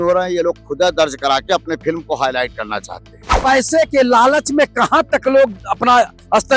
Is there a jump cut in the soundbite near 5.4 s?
no; 1 cut; at 3.3 s

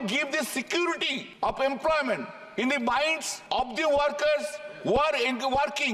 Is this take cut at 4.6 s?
no; 2 cuts; at 1.2 s, 3.3 s

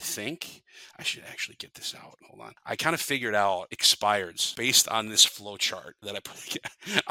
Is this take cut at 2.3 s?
yes; 4 cuts; at 2.3 s, 3.8 s, 4.4 s, 5.9 s

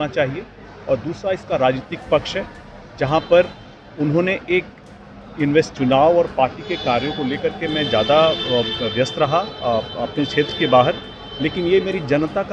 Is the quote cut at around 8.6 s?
no; 1 cut; at 5.7 s

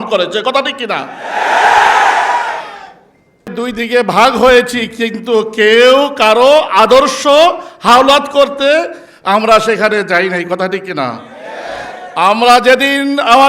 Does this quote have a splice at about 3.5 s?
yes; 1 cut; at 3.5 s

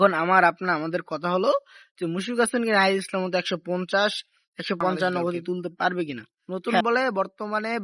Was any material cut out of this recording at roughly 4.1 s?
no; 1 cut; at 6.8 s

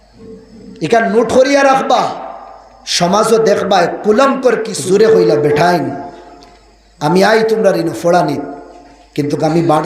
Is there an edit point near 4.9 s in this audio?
yes; 1 cut; at 4.9 s

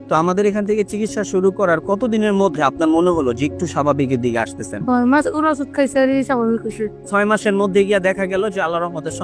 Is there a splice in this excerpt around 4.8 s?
yes; 2 cuts; at 4.8 s, 6.9 s

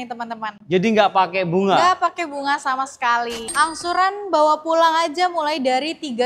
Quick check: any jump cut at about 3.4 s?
yes; 1 cut; at 3.4 s

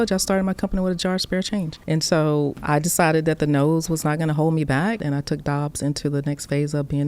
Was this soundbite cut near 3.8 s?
no; 3 cuts; at 1.8 s, 2.6 s, 5.0 s

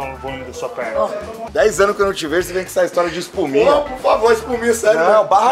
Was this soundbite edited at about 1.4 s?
yes; 1 cut; at 1.4 s

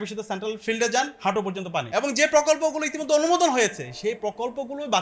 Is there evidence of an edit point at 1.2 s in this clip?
yes; 1 cut; at 1.2 s

